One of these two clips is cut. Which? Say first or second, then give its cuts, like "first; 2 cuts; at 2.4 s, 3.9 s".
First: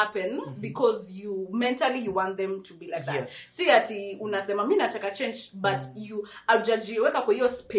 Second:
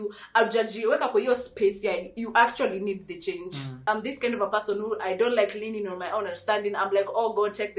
second; 1 cut; at 3.7 s